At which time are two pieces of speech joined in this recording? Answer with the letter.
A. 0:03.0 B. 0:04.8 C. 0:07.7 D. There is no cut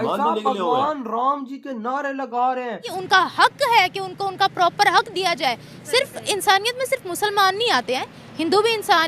A